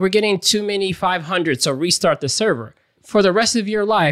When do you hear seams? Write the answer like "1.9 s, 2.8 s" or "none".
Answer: 3.0 s